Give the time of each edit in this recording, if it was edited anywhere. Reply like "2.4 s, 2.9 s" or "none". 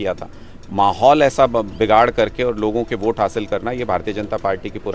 none

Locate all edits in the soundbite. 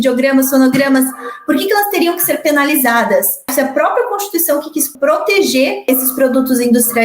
3.5 s, 4.9 s, 5.9 s

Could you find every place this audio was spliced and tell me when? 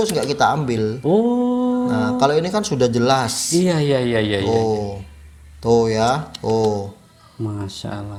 none

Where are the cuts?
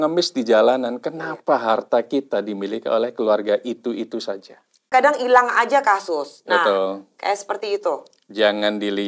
4.9 s

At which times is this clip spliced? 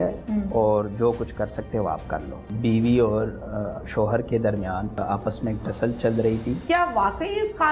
2.4 s, 5.0 s, 6.6 s

